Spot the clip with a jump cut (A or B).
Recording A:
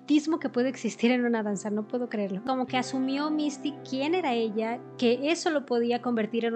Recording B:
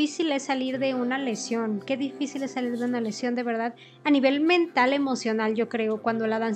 A